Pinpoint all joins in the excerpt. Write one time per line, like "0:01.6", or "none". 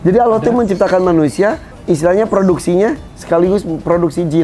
none